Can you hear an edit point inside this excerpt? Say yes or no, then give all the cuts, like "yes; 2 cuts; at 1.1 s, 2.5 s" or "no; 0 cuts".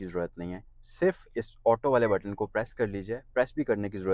no; 0 cuts